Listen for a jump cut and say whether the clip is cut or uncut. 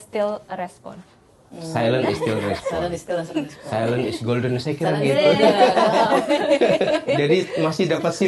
uncut